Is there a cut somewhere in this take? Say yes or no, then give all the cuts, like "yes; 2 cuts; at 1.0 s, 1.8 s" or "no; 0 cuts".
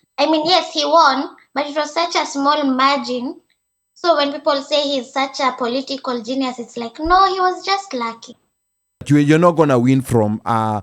yes; 1 cut; at 9.0 s